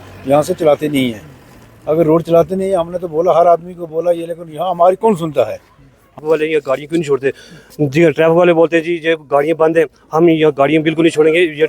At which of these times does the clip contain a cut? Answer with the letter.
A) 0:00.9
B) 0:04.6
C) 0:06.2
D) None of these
C